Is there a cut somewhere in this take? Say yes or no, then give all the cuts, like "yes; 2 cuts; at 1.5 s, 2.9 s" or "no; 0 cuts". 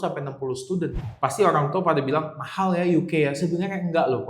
yes; 1 cut; at 1.1 s